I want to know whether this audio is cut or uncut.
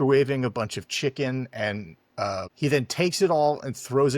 cut